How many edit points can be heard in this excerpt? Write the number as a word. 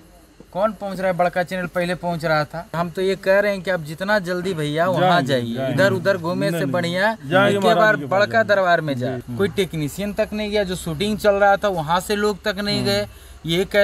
two